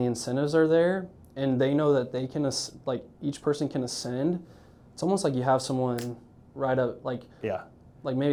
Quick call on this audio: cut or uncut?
uncut